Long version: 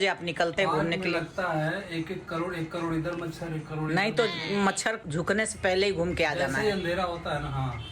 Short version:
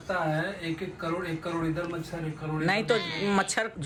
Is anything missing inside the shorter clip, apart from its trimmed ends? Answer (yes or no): no